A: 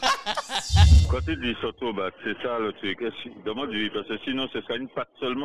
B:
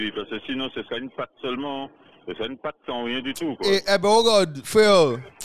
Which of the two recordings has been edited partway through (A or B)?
A